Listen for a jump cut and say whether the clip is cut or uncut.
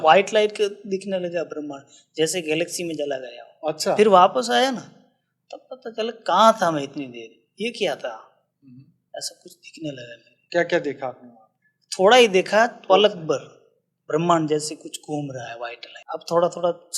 cut